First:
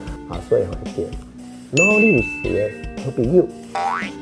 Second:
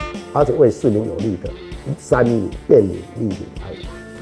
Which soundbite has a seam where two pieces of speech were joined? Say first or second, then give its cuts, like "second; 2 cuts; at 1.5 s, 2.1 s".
second; 1 cut; at 2.6 s